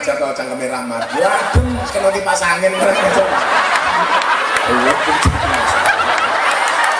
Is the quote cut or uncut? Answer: uncut